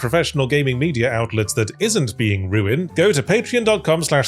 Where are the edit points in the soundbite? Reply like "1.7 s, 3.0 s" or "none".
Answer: 2.8 s